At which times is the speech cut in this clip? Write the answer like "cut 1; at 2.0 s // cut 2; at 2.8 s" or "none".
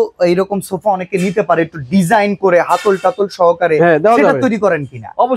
none